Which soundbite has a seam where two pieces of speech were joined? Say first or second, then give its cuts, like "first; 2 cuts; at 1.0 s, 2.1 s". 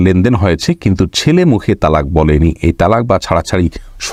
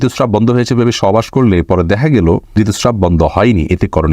second; 1 cut; at 2.5 s